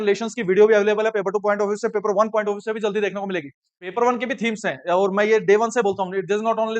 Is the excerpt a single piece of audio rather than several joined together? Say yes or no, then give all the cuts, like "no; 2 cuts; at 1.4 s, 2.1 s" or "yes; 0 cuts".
no; 1 cut; at 3.9 s